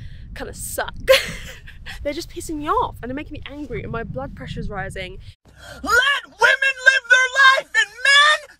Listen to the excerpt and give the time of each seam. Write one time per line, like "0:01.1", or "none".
none